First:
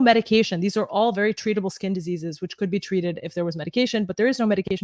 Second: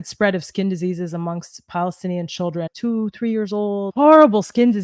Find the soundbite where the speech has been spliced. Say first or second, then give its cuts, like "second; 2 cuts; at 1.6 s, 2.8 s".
second; 2 cuts; at 2.7 s, 3.9 s